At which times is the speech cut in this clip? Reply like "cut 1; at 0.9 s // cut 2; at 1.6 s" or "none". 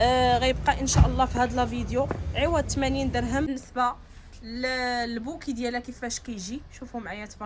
cut 1; at 3.5 s